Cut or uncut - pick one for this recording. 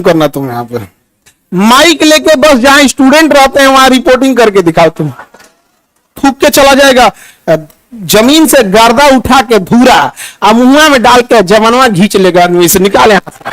cut